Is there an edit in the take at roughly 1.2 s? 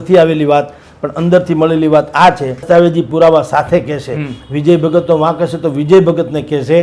no; 1 cut; at 2.6 s

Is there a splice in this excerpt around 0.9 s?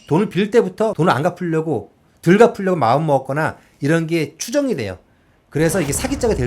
yes; 1 cut; at 0.9 s

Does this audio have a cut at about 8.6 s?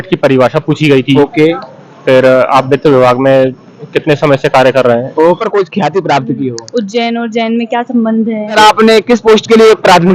yes; 2 cuts; at 5.4 s, 8.6 s

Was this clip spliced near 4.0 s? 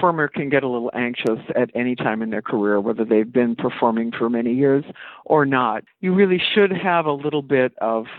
no; 1 cut; at 5.8 s

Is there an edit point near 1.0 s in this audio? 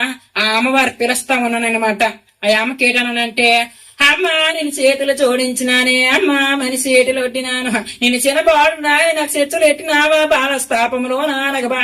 no; 0 cuts

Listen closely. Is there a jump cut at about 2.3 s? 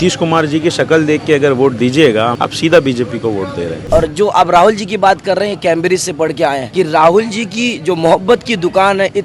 yes; 3 cuts; at 2.3 s, 3.8 s, 6.6 s

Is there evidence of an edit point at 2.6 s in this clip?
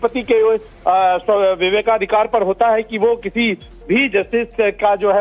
yes; 1 cut; at 2.6 s

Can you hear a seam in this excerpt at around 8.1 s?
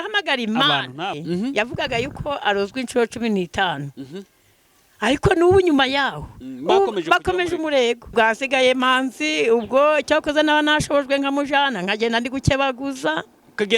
yes; 2 cuts; at 1.2 s, 8.1 s

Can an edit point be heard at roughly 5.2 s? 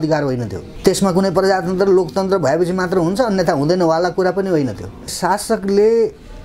yes; 1 cut; at 5.2 s

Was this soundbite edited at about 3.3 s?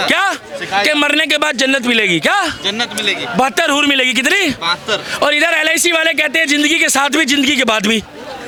no; 0 cuts

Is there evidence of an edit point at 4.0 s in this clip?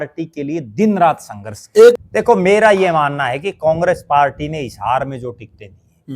no; 1 cut; at 2.0 s

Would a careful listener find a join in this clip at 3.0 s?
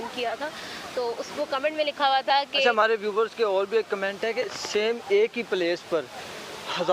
yes; 1 cut; at 3.0 s

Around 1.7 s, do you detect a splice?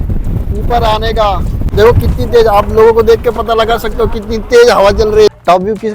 yes; 2 cuts; at 1.7 s, 5.3 s

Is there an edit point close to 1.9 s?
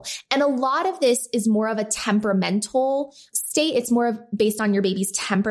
no; 1 cut; at 3.3 s

